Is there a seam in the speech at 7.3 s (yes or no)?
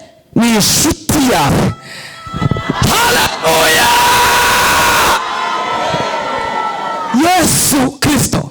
no